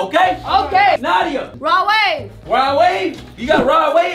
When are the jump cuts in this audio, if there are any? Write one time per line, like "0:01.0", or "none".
0:01.0